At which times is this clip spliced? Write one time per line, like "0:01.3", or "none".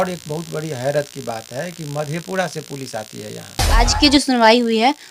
0:03.9